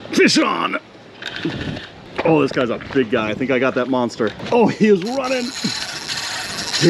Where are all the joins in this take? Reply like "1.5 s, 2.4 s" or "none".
2.0 s, 4.4 s